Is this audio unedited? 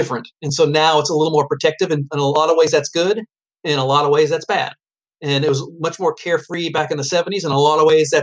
yes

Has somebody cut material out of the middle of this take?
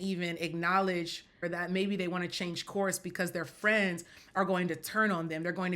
yes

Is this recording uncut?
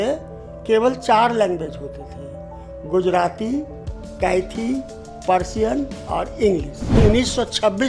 no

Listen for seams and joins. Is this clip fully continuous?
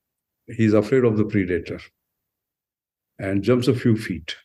yes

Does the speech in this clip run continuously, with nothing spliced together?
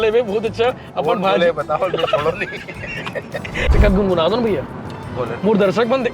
no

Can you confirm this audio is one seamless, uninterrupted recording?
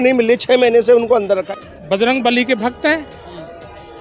no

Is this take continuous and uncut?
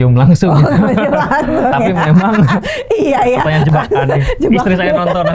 yes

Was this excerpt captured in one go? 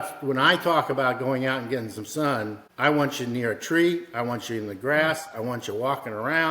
no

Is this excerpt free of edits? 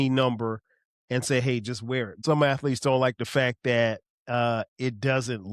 no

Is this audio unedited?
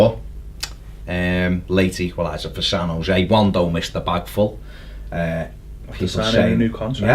no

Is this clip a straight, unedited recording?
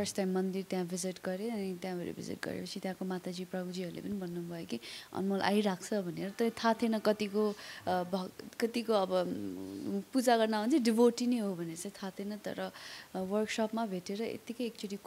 yes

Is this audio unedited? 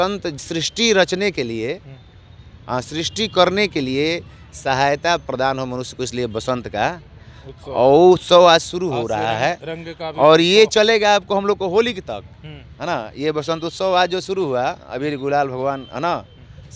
yes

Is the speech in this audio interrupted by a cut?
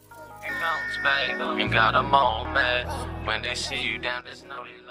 no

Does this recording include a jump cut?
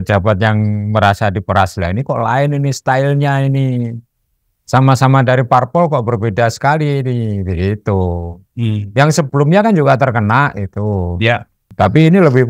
yes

